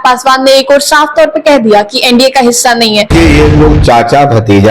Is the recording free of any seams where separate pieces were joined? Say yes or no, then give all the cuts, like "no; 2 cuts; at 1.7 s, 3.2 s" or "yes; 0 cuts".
no; 1 cut; at 3.1 s